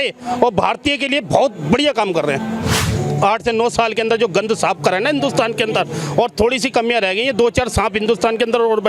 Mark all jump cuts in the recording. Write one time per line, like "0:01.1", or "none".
0:02.8